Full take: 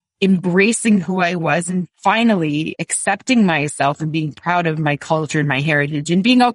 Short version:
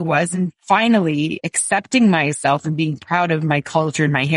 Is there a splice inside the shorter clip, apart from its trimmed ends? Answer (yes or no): no